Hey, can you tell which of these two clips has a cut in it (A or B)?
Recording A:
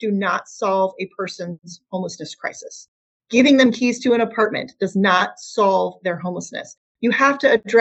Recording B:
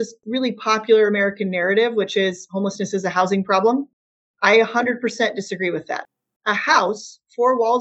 B